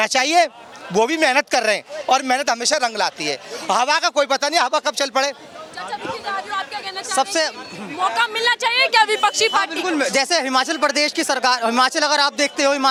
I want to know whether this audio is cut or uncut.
uncut